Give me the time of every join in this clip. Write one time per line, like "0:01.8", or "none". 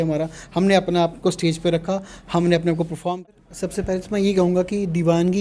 0:03.3

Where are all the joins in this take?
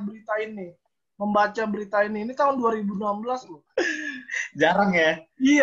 0:03.6

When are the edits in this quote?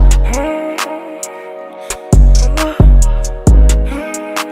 none

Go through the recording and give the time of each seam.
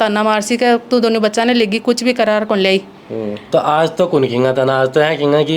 none

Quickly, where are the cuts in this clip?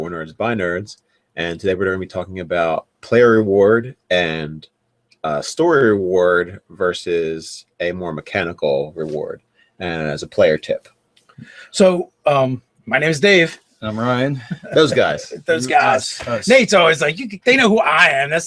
0:01.2

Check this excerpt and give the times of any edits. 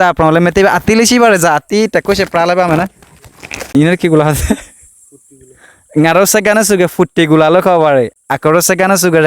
0:03.0

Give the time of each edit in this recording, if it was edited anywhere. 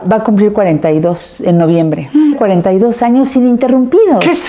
0:02.3

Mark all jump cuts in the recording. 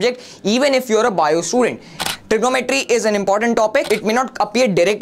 0:02.0

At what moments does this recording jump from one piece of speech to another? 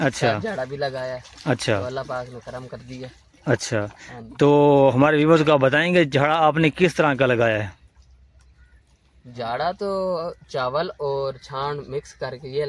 none

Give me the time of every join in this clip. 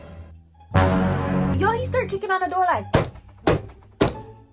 0:01.5

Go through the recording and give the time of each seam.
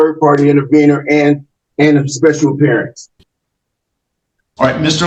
none

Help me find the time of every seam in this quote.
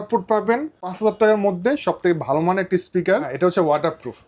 0:00.9
0:03.3

